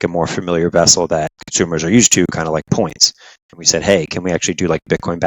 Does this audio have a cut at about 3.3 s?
no; 1 cut; at 1.4 s

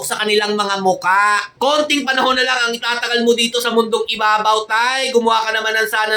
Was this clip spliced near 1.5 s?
yes; 1 cut; at 1.5 s

